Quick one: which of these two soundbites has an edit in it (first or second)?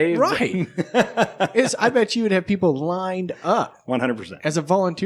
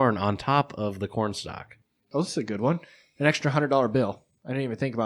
second